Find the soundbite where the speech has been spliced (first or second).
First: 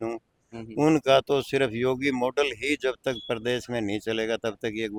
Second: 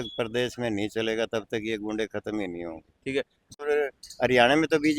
second